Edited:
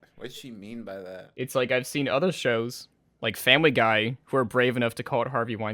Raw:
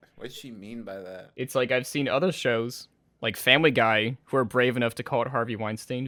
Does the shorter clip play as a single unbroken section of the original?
yes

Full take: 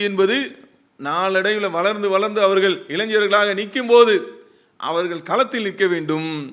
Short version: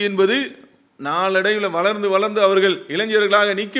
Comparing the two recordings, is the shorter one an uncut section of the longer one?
yes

